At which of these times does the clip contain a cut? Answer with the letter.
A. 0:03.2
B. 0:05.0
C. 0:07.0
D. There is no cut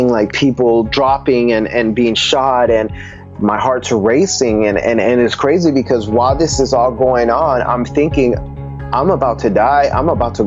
A